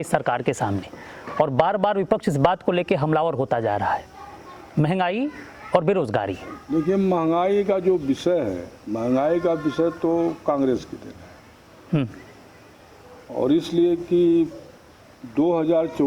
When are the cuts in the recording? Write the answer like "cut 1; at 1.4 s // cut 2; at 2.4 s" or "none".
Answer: none